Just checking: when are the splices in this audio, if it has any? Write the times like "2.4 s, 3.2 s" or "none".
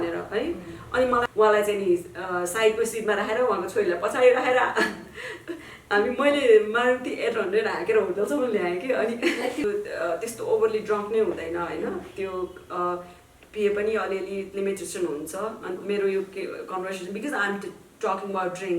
1.2 s, 9.6 s, 15.8 s